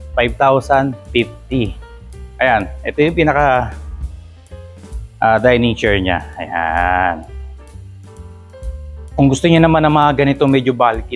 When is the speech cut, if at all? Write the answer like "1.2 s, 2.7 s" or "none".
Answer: none